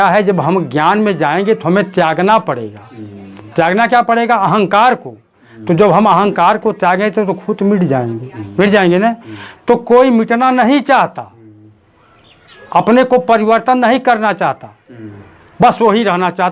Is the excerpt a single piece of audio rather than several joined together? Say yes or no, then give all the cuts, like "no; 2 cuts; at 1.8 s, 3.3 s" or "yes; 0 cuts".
yes; 0 cuts